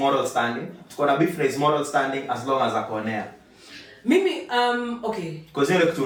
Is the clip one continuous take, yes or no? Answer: yes